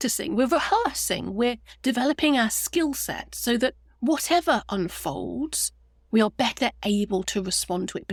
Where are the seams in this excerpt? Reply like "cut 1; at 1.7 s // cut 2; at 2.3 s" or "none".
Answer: none